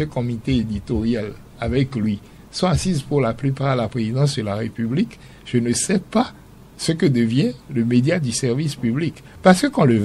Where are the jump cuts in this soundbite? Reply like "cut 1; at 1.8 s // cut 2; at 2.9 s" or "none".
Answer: none